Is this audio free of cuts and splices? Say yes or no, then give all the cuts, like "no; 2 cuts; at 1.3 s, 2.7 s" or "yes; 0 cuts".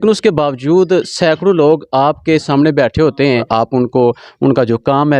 no; 1 cut; at 3.5 s